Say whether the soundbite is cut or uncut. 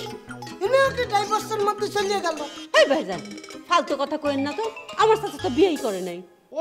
uncut